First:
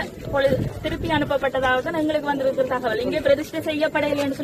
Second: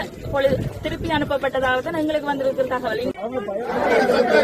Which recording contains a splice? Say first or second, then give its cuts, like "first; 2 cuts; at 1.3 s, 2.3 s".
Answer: second; 1 cut; at 3.1 s